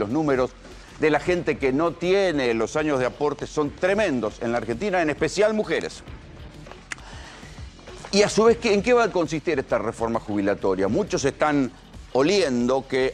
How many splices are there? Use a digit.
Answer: 0